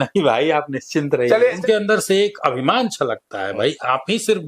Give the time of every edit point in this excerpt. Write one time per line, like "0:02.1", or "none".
0:01.6